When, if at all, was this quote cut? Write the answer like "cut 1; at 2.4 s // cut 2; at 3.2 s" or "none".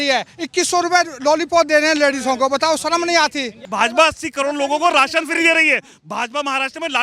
cut 1; at 3.6 s